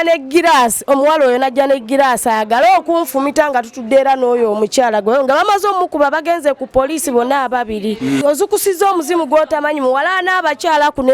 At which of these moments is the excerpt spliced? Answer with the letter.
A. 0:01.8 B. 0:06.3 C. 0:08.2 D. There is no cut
C